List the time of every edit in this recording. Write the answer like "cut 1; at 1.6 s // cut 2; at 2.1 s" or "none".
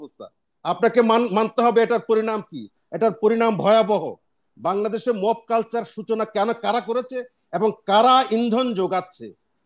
none